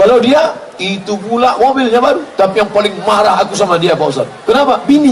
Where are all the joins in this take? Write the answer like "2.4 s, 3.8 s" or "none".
none